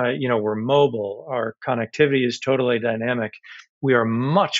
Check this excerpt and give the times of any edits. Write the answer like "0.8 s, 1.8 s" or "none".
none

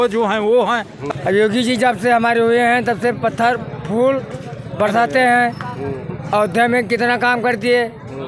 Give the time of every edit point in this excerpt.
1.0 s

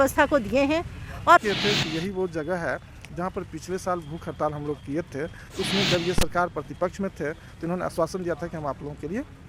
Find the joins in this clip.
1.4 s

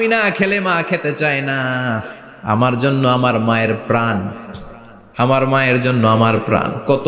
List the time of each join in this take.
none

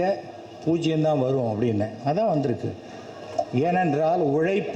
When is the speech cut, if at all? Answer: none

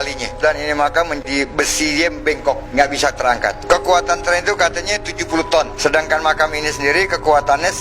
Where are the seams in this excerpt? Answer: 1.2 s

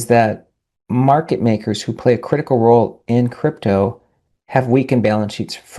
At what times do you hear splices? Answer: none

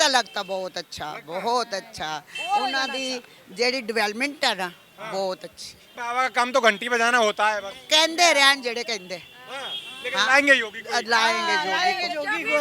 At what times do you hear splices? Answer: 5.9 s

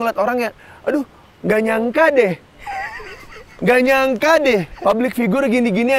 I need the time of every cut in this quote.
2.5 s, 4.7 s

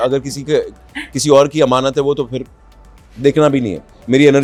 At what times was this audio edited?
none

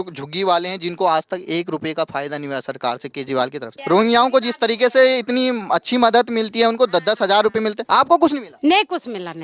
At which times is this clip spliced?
3.7 s, 7.8 s, 8.5 s

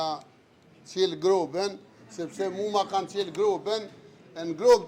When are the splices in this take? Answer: none

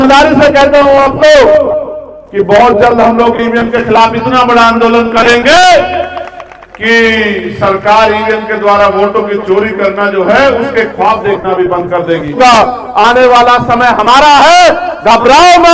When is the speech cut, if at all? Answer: 12.4 s

